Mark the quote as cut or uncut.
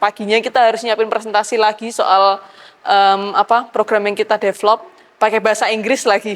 uncut